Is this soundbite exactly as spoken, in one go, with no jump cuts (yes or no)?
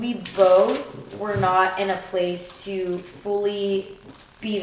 yes